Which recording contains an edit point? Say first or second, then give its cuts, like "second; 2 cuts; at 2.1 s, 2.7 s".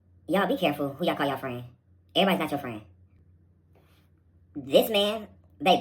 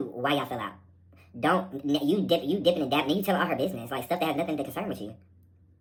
first; 1 cut; at 3.0 s